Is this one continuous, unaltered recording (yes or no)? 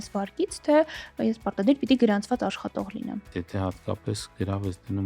no